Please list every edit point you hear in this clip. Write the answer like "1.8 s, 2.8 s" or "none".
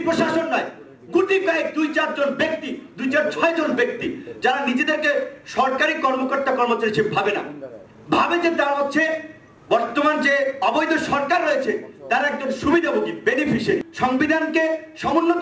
13.9 s